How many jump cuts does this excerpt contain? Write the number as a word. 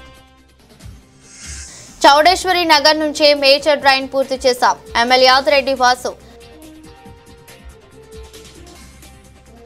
one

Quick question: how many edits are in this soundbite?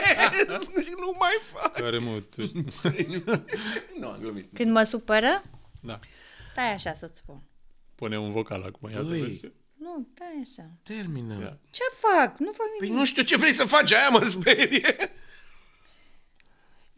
zero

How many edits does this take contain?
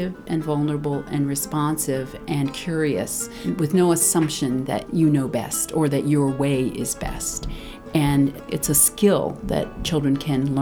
four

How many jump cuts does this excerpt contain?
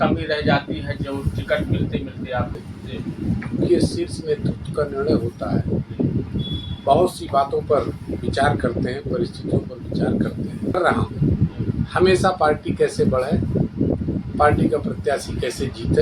two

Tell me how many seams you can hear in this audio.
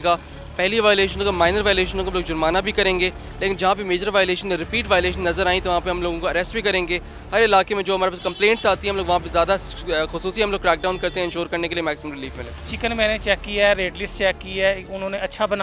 two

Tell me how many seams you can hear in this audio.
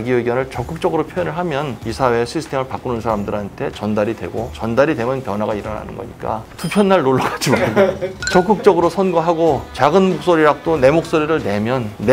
zero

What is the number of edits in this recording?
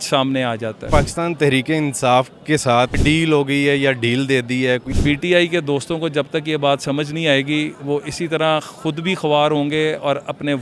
three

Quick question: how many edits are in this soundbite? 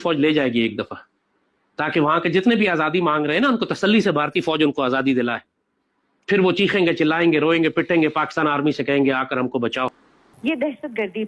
one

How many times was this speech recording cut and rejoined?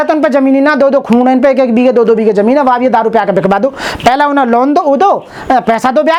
zero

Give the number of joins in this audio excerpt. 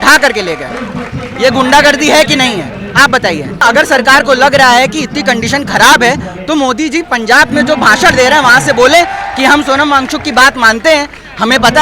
one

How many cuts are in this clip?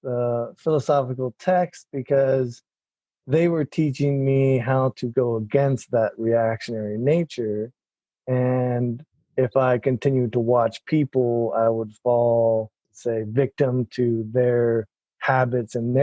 one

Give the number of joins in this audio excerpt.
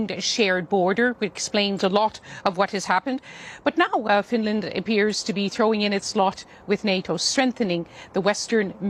zero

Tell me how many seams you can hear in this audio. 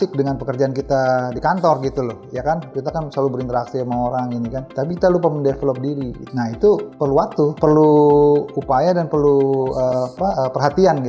one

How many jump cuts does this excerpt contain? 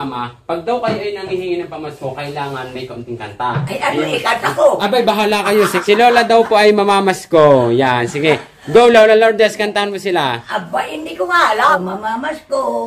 two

